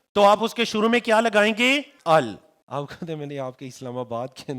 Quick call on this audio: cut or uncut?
cut